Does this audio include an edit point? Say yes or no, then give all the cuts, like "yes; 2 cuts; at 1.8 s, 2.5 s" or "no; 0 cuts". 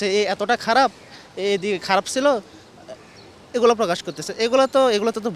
no; 0 cuts